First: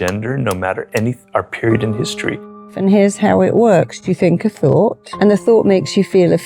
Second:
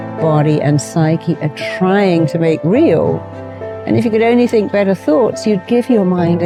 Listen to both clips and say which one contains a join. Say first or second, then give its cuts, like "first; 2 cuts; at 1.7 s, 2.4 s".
first; 3 cuts; at 2.7 s, 4.0 s, 5.1 s